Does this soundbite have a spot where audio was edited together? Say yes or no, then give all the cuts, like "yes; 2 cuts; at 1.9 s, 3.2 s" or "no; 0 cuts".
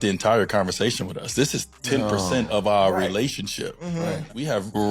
no; 0 cuts